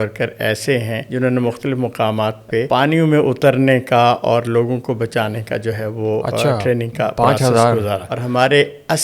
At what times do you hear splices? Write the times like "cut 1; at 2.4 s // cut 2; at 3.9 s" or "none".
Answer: cut 1; at 1.0 s // cut 2; at 2.7 s // cut 3; at 8.1 s